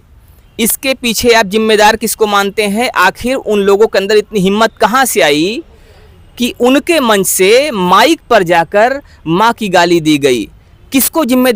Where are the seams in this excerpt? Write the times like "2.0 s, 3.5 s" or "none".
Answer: none